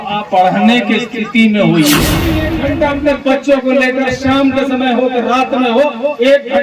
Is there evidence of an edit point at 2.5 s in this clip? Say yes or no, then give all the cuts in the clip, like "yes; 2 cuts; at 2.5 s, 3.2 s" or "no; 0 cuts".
yes; 1 cut; at 2.5 s